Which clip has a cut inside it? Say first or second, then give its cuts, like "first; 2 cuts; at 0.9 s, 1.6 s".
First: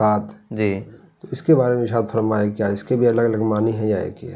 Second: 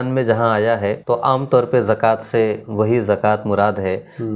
second; 1 cut; at 1.0 s